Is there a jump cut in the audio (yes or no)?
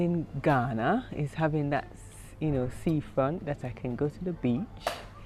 no